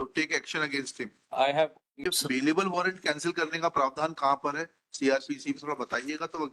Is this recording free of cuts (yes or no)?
no